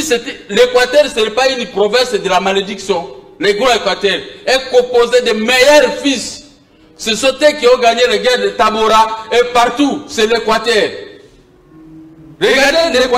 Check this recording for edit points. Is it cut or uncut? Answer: uncut